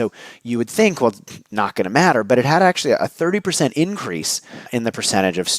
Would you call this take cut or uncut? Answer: cut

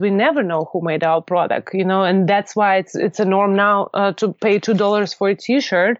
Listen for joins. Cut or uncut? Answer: uncut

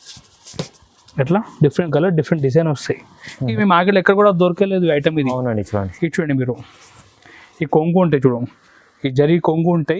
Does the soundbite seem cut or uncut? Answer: cut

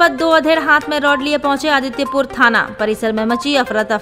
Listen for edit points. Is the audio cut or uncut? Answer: uncut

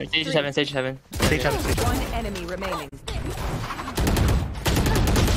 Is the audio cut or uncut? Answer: uncut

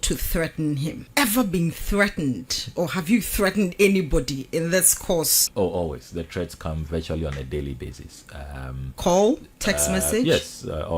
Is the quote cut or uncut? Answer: cut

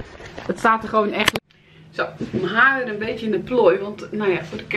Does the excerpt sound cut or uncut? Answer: cut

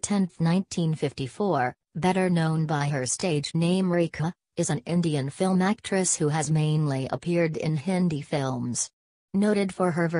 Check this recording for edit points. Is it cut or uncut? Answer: uncut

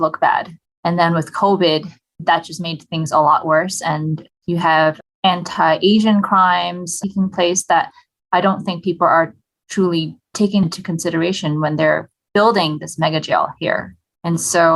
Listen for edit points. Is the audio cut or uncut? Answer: cut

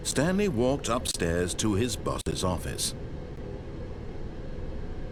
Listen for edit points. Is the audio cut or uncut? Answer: uncut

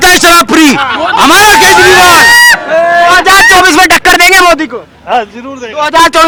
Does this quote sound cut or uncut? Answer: uncut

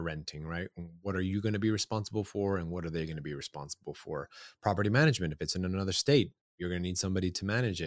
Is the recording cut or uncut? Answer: uncut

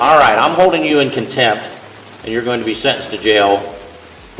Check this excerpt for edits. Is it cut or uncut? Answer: uncut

